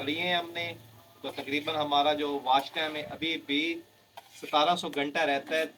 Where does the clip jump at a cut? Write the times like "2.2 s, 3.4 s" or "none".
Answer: none